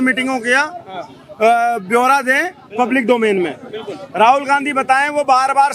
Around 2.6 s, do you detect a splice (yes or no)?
no